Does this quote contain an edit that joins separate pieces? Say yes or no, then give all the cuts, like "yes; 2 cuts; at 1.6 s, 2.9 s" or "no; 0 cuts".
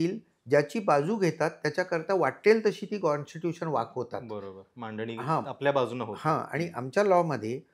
no; 0 cuts